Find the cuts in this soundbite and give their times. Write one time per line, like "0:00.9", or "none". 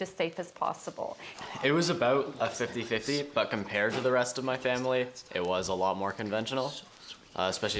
none